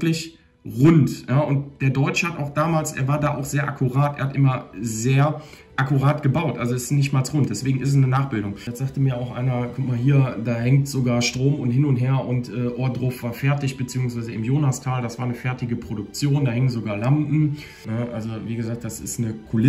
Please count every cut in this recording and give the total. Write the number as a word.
two